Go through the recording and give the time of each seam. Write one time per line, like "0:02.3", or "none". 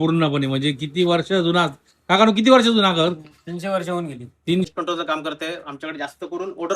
0:04.7